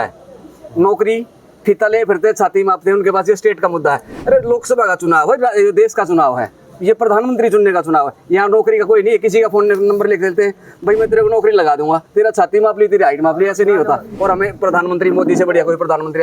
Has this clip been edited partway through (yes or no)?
yes